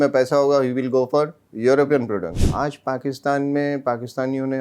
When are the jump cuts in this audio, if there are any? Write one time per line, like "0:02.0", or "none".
0:02.3

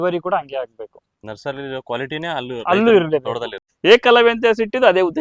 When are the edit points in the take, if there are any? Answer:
0:03.6

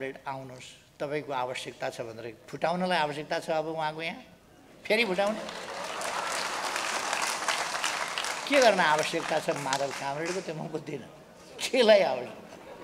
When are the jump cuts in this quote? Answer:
none

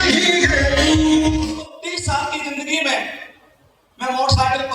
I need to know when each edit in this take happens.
0:01.5

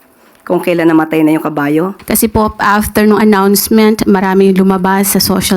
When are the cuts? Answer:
0:02.0

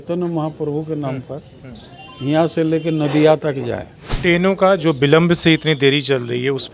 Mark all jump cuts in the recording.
0:04.1

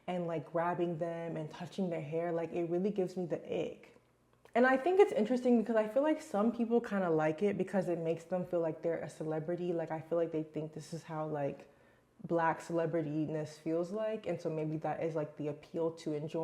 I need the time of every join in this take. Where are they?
0:04.4

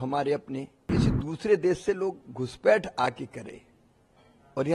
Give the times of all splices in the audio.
0:00.9

